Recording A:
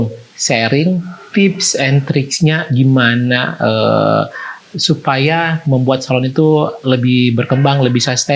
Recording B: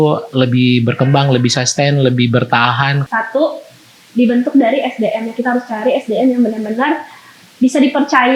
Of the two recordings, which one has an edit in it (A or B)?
B